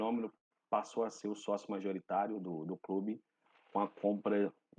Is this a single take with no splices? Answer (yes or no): yes